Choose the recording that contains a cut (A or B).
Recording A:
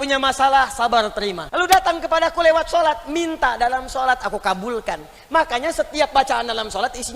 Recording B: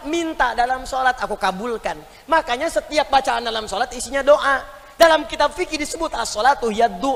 A